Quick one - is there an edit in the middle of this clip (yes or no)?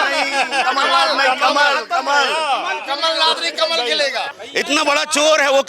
yes